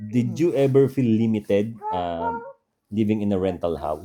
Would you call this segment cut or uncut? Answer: uncut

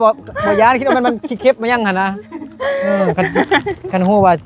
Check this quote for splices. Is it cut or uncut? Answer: uncut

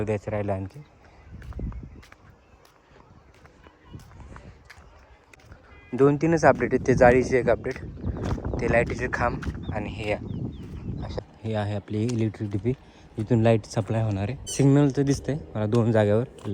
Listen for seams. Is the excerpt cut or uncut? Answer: cut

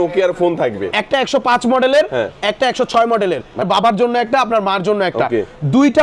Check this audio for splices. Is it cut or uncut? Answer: cut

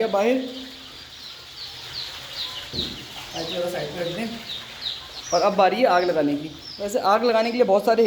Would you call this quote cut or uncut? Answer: uncut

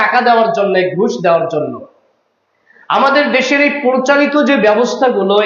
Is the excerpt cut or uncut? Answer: uncut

